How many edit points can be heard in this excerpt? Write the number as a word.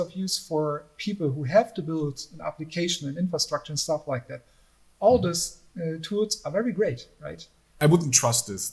one